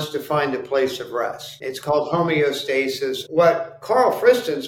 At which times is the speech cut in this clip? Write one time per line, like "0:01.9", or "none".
0:01.5
0:03.2

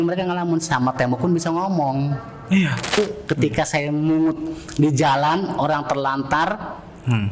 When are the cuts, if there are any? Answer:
0:02.9

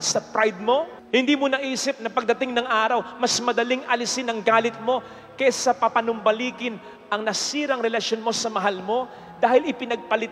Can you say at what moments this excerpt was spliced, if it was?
none

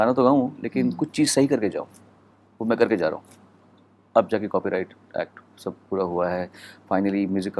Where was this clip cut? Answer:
none

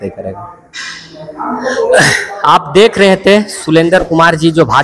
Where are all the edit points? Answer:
none

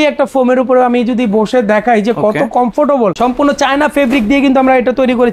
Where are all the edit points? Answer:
0:03.1

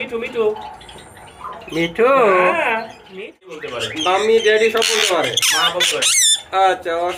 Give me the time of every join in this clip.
0:03.5

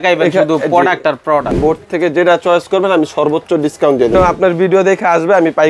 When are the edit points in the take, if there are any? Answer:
0:01.5
0:04.2

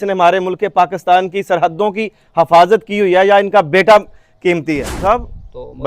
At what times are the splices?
0:04.9

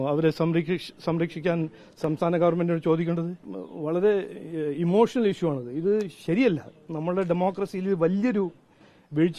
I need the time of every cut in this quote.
0:03.4

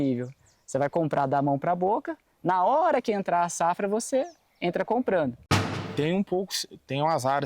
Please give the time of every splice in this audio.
0:05.7

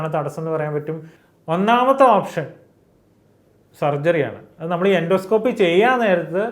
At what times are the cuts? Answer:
0:01.1

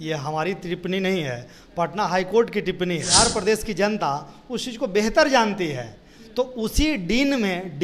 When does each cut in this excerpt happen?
0:03.1

